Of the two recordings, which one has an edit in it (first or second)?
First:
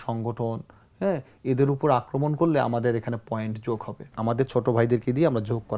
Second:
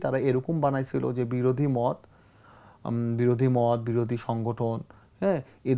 first